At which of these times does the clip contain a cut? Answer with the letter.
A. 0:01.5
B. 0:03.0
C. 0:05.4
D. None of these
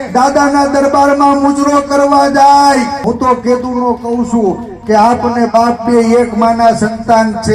B